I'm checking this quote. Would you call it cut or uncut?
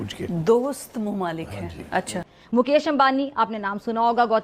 cut